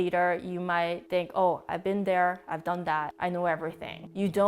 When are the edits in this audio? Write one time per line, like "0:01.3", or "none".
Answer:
0:01.0
0:03.5